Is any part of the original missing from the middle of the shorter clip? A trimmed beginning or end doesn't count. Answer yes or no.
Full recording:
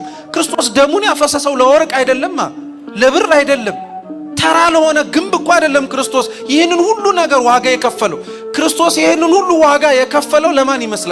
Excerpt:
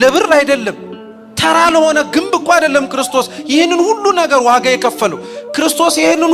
no